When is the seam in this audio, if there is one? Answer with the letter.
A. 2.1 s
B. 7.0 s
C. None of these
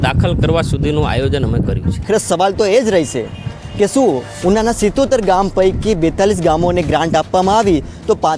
A